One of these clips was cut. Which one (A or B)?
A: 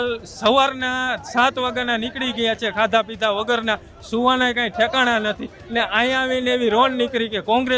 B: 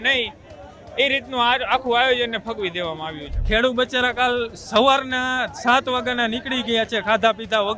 B